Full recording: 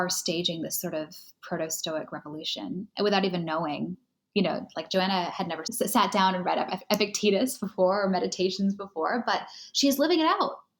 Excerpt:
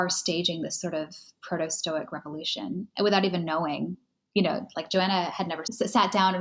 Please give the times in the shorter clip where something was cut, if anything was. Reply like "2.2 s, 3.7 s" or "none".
none